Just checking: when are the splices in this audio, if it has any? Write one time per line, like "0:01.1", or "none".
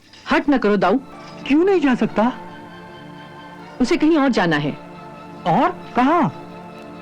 0:01.1